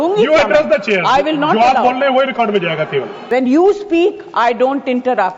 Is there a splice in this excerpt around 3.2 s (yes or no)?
yes